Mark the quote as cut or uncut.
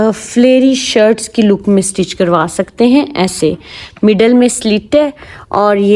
uncut